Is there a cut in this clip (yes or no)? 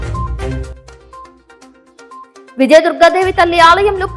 yes